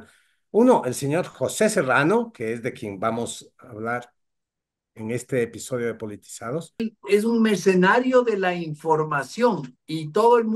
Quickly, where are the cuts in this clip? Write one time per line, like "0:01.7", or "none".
0:06.9

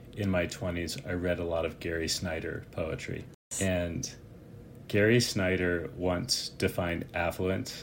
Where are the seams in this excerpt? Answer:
0:03.4

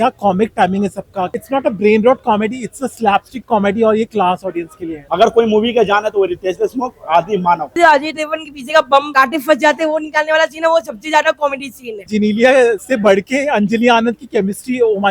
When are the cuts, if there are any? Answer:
0:01.3
0:05.1
0:07.8
0:12.1

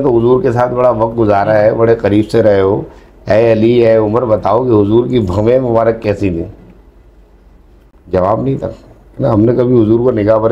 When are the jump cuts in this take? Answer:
0:08.1

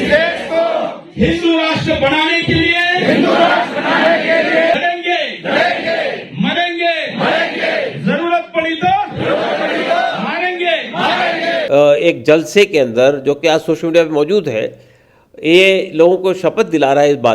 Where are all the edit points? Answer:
0:04.8
0:11.7

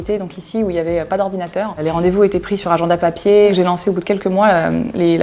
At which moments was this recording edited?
0:03.5

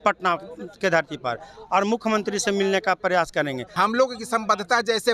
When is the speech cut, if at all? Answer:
0:03.6

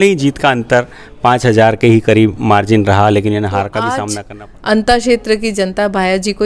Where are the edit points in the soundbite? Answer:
0:04.1

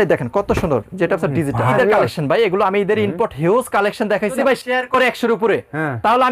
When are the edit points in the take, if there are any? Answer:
0:01.7
0:04.4

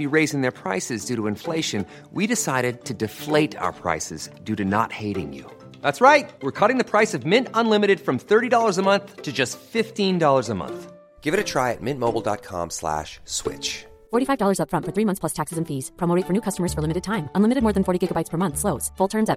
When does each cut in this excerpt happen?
none

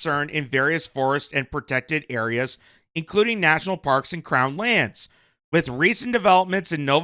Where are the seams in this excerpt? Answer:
none

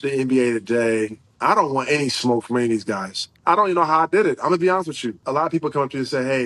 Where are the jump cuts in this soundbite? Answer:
0:01.2
0:03.4
0:05.2

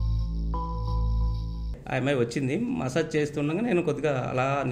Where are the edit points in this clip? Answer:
0:01.8

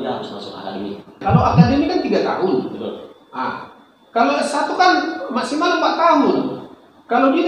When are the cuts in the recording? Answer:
0:01.2

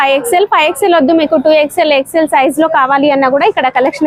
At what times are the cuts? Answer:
none

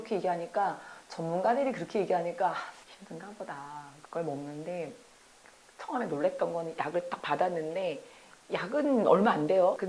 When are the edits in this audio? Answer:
none

